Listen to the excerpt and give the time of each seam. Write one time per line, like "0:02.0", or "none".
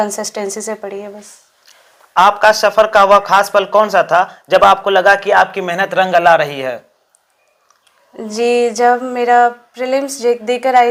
none